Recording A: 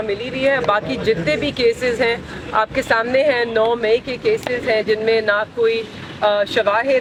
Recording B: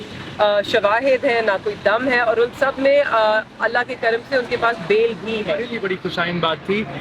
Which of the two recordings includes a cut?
B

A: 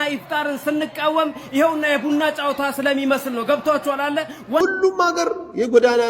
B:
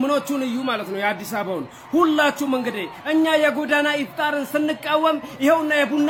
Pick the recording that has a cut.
A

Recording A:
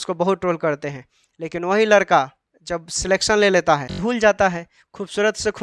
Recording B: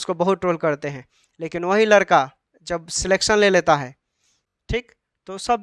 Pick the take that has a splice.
A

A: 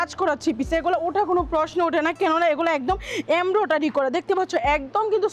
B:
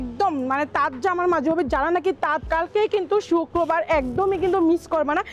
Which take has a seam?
B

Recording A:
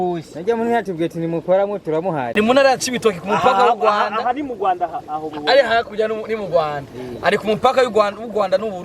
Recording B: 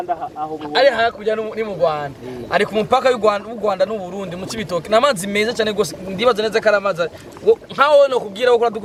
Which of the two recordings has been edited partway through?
A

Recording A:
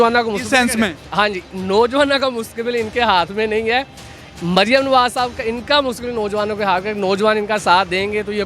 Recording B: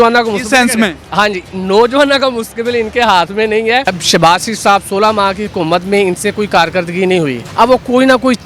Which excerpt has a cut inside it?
B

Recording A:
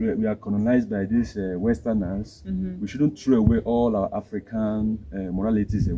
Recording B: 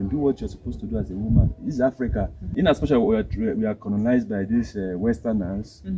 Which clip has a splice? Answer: B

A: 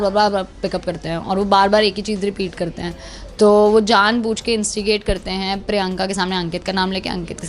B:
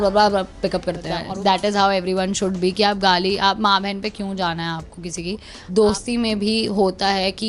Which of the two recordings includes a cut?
B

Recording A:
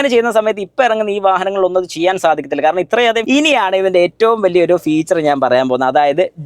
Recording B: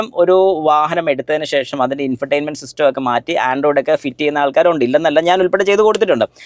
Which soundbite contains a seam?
A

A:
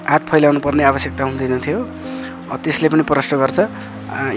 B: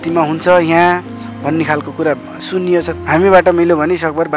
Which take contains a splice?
B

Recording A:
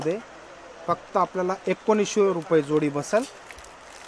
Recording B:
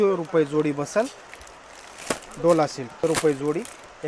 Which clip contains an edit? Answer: B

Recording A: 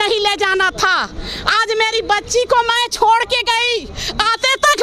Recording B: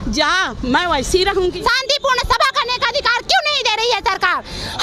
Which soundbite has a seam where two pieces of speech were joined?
B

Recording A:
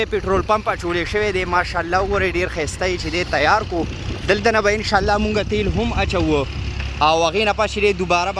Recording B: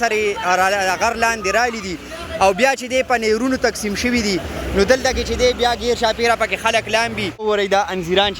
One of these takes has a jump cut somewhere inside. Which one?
B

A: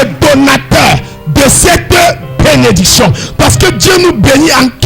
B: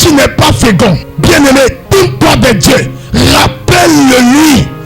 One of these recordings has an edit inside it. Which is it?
B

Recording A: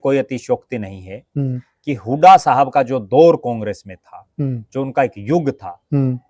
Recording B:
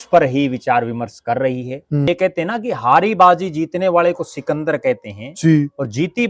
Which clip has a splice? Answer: B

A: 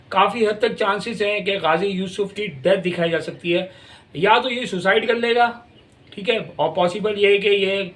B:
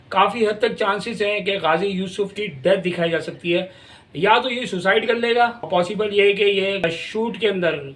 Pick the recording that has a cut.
B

